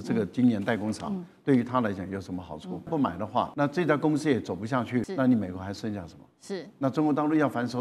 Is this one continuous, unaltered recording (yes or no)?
no